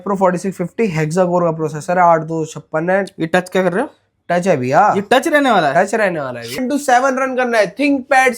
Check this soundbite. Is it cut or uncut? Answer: cut